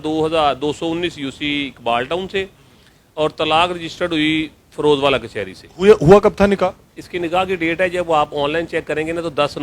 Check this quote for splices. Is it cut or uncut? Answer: uncut